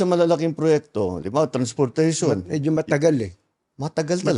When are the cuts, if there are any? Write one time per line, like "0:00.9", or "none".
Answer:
none